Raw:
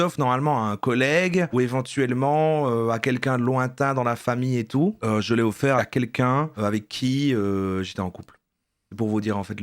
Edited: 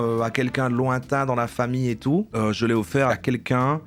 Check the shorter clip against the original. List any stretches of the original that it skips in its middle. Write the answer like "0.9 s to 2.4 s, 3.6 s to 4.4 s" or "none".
none

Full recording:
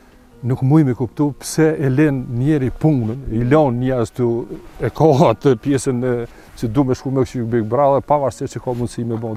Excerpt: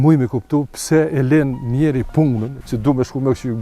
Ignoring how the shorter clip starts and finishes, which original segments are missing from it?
3.2 s to 6.4 s

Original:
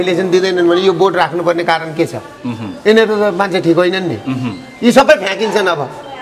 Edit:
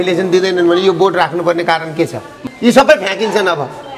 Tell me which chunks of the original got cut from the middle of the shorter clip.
2.4 s to 4.6 s

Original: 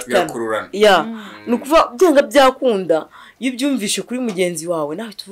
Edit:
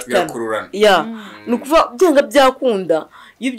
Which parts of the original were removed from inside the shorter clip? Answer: none

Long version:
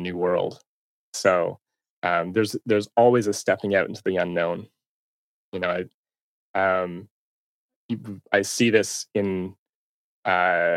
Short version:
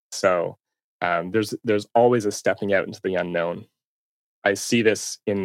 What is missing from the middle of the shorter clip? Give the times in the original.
5.3 s to 8.1 s

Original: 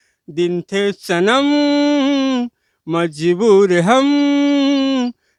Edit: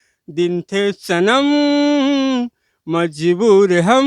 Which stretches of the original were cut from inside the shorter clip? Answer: none

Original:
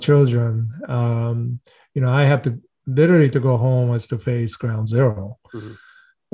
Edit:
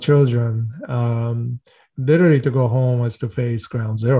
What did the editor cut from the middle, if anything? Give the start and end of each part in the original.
1.8 s to 2.7 s

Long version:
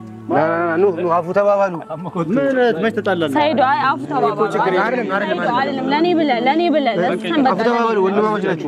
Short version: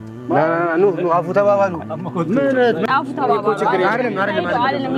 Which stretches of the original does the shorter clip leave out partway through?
2.9 s to 3.8 s

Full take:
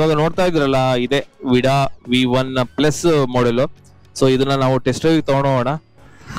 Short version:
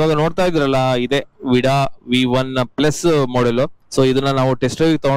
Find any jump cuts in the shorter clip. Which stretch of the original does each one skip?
3.8 s to 4.0 s

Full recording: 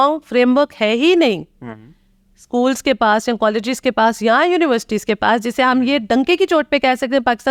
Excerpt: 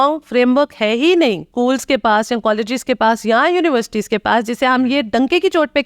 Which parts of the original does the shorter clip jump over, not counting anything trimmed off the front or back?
1.4 s to 2.4 s

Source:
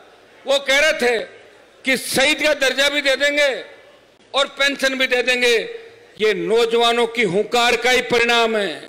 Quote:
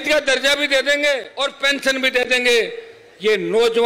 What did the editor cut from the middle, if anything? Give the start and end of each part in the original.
3.6 s to 4.3 s

